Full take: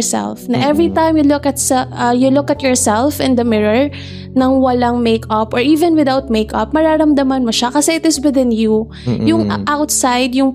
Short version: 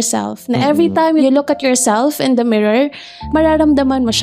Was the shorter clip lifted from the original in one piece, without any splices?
no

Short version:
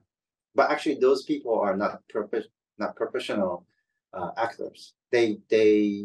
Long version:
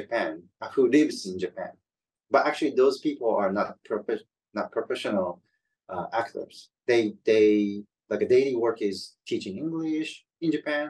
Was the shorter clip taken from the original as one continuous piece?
yes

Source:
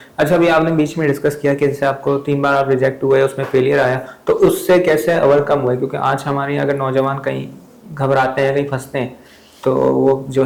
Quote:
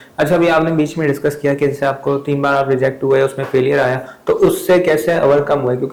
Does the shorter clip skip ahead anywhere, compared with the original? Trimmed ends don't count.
no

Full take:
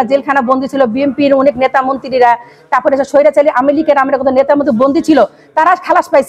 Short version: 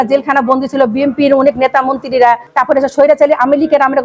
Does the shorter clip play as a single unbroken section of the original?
no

